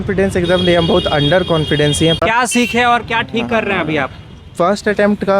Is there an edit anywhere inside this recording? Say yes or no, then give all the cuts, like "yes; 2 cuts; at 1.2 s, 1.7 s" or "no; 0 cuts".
yes; 1 cut; at 2.2 s